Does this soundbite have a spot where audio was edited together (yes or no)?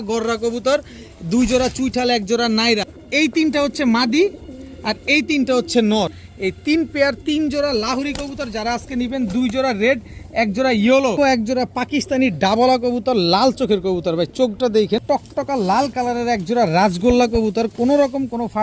yes